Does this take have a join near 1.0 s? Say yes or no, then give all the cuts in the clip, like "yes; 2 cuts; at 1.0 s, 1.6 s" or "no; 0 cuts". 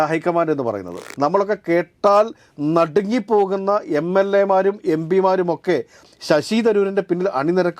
yes; 1 cut; at 1.0 s